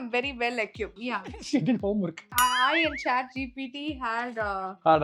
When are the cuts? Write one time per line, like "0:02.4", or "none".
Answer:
0:01.0
0:02.3